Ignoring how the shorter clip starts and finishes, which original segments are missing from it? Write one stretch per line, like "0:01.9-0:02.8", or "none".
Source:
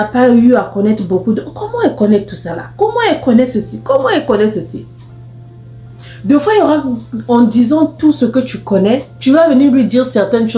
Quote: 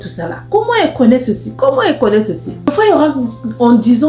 0:04.9-0:06.4